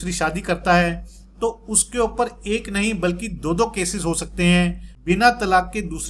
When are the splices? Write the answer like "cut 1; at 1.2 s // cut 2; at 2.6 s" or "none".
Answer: cut 1; at 4.9 s